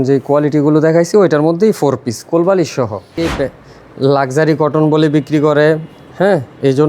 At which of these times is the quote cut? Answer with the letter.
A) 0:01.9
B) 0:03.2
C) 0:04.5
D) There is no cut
B